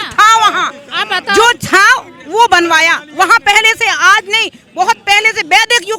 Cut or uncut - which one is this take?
uncut